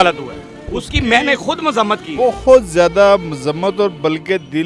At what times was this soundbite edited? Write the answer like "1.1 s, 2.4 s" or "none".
none